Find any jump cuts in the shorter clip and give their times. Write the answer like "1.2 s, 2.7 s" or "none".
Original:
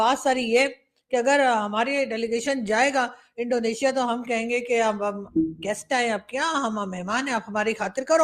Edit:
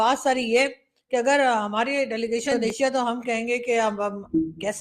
2.6 s